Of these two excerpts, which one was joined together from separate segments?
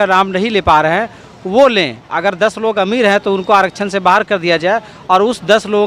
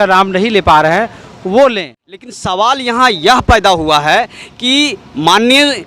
second; 1 cut; at 1.9 s

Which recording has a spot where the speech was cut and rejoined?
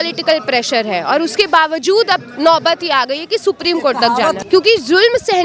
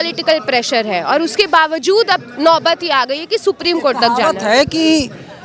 first; 1 cut; at 4.4 s

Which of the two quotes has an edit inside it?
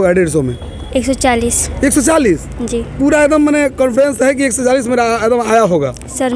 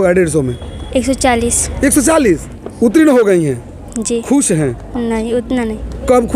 second; 1 cut; at 2.5 s

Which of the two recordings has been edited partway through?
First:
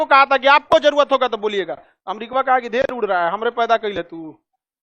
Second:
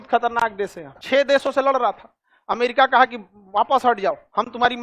second; 1 cut; at 0.9 s

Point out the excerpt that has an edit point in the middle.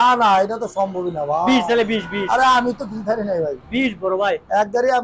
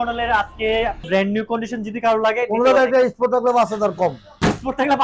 second; 1 cut; at 1.0 s

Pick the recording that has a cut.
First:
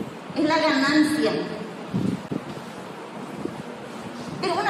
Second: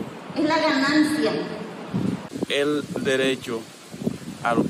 second; 1 cut; at 2.3 s

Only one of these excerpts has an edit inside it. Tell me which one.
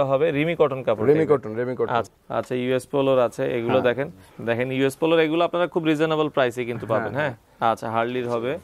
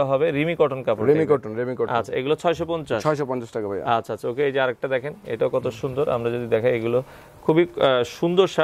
first; 3 cuts; at 2.1 s, 4.3 s, 7.4 s

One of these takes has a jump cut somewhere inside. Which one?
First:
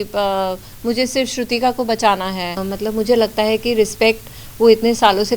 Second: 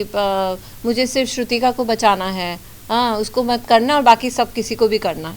first; 1 cut; at 2.6 s

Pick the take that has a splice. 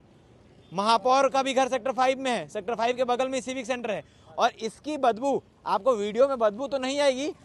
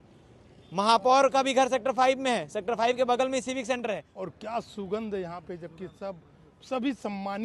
second; 1 cut; at 4.2 s

